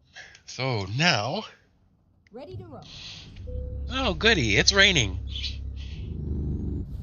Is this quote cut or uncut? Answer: cut